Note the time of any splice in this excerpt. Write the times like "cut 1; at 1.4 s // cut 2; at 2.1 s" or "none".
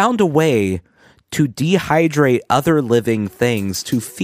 none

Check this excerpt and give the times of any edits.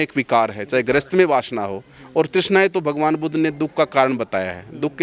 none

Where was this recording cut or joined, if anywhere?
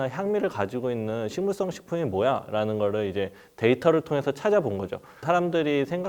none

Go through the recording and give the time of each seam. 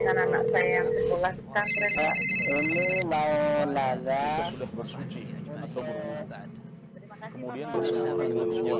cut 1; at 7.7 s

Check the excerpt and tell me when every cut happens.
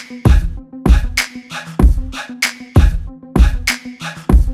none

